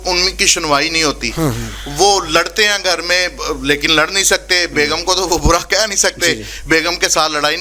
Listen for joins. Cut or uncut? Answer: uncut